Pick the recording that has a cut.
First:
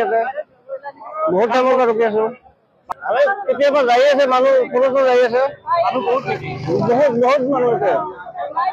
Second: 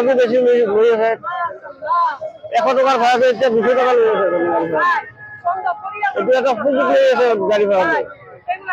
first; 1 cut; at 2.8 s

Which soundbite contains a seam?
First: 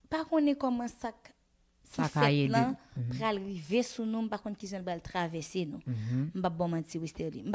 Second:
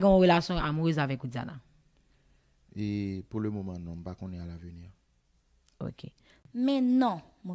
second; 1 cut; at 6.4 s

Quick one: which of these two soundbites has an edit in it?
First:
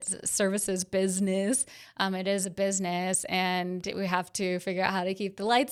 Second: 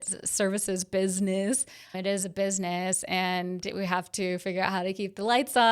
second; 1 cut; at 1.9 s

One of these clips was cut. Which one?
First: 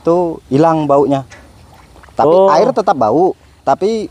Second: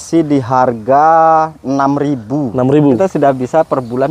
second; 1 cut; at 3.0 s

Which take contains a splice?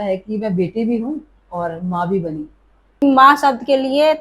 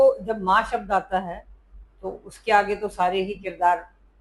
first; 1 cut; at 3.0 s

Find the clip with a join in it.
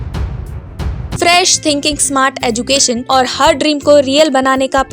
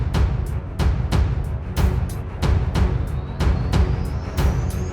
first; 2 cuts; at 1.0 s, 3.0 s

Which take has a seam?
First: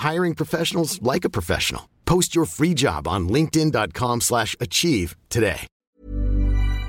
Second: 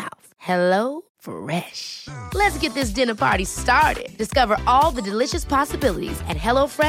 first; 1 cut; at 5.7 s

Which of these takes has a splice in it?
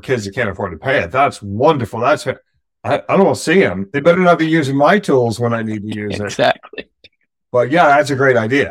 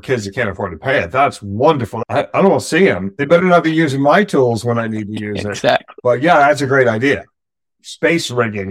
second; 2 cuts; at 1.9 s, 5.9 s

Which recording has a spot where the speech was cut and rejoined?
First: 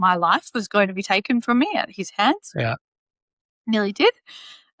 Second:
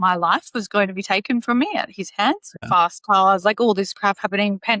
second; 1 cut; at 2.5 s

